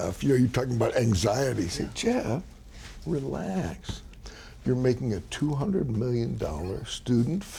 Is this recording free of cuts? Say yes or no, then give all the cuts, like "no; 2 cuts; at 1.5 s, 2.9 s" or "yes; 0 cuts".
yes; 0 cuts